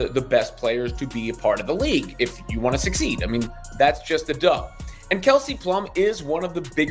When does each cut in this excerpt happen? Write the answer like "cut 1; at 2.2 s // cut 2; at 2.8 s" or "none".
none